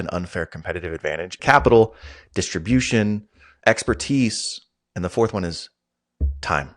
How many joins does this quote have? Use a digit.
1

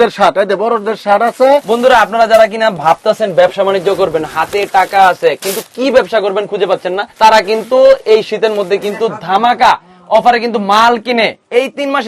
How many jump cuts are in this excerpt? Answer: 2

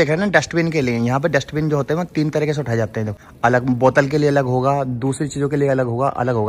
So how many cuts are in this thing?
1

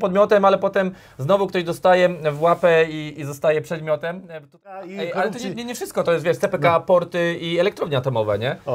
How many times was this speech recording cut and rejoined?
1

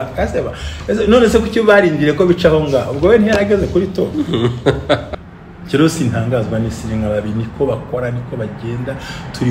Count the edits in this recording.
1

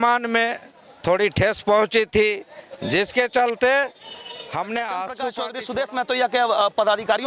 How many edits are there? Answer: 1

